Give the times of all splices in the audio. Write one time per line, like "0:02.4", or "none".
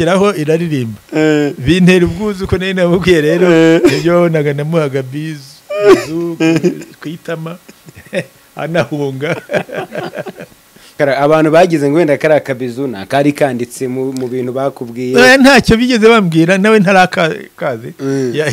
0:11.0